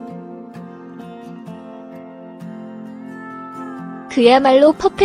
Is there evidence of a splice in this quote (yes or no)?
no